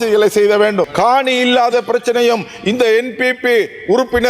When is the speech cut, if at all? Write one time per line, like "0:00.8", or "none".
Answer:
0:00.9